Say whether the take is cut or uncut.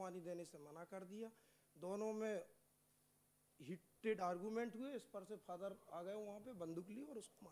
uncut